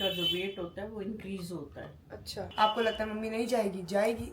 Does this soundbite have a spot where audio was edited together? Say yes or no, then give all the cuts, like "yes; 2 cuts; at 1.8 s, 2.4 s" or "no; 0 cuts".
yes; 1 cut; at 2.4 s